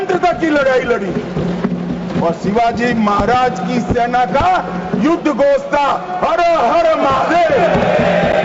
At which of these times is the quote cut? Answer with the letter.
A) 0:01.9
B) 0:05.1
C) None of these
C